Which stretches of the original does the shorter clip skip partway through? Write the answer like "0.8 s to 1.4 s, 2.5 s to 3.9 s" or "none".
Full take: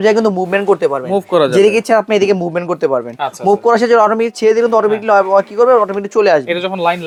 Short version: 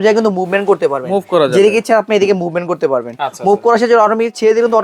none